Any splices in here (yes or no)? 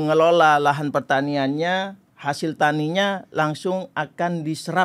no